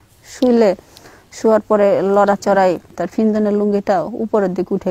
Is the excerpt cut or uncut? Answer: cut